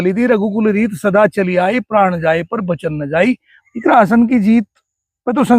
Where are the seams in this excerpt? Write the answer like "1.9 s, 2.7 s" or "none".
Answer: 3.5 s

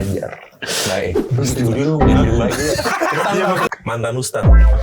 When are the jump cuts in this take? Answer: 3.7 s

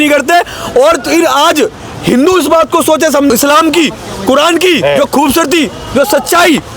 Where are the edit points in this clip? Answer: 3.3 s

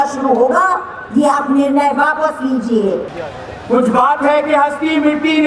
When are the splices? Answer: 3.2 s

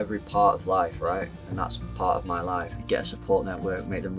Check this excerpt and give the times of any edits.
2.7 s

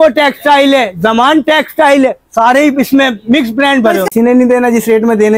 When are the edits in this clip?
4.1 s

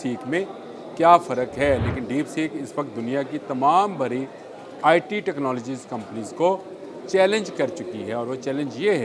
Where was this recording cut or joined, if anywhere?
none

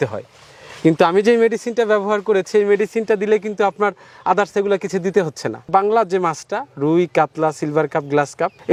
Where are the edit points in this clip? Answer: none

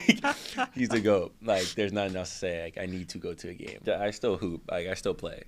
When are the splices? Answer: 3.8 s

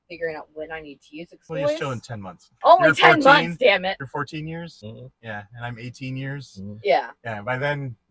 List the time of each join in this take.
1.5 s, 2.5 s, 4.4 s

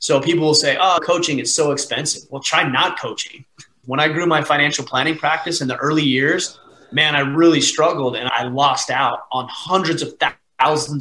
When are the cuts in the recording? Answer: 3.8 s, 8.3 s

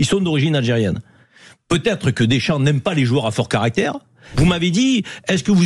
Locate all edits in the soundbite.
4.2 s

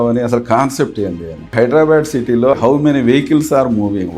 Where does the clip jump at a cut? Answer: 1.5 s, 2.5 s

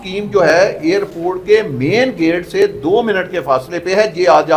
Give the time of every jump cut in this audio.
none

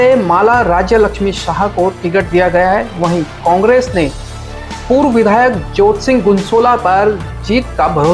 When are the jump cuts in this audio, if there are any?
none

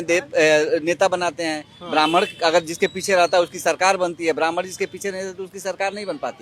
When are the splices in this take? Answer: none

